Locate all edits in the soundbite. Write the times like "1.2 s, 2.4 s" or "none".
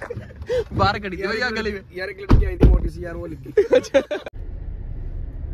4.3 s

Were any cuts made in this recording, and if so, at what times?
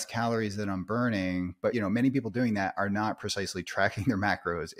1.7 s

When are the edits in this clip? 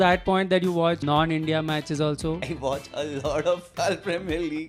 1.0 s, 2.5 s, 3.7 s

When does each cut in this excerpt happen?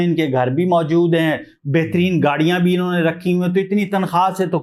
none

